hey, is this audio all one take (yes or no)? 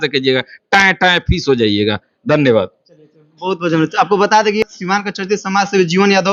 yes